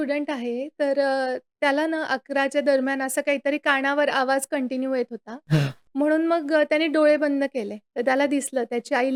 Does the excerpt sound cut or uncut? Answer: uncut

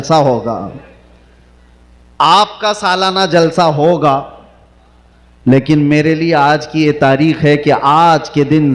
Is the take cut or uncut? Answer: uncut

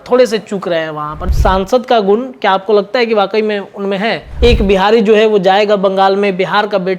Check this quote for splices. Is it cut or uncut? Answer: cut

